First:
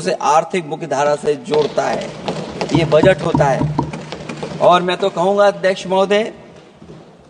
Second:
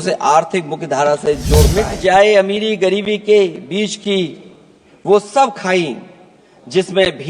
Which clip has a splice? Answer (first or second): second